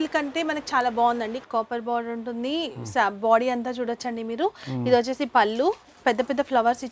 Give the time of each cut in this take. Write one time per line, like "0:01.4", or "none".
0:01.4